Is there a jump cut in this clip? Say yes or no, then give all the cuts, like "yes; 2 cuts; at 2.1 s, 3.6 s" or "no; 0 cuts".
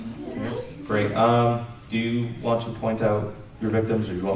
yes; 1 cut; at 2.0 s